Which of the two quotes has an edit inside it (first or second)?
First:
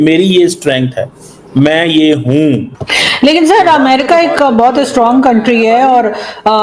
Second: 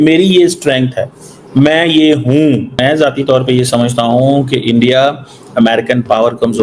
first